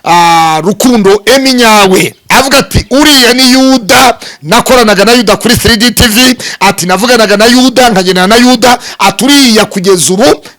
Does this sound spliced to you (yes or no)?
no